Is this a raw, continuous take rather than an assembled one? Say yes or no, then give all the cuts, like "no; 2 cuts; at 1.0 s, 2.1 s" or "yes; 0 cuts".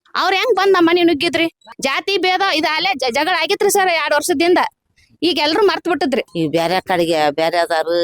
no; 2 cuts; at 1.7 s, 6.3 s